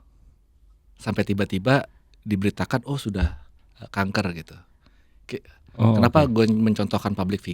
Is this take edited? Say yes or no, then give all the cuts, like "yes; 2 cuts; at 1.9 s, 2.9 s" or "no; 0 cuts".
no; 0 cuts